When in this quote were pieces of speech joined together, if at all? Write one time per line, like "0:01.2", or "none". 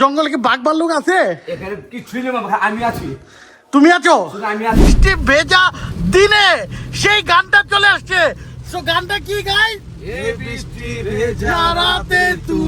0:05.0